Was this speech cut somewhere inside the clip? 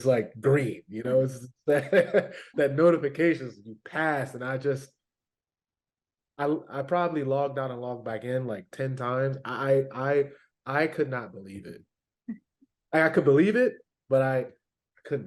no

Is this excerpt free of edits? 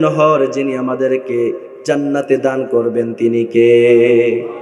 yes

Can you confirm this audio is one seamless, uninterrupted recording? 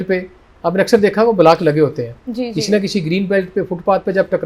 yes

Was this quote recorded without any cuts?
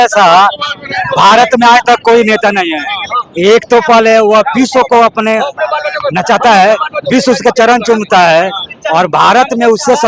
yes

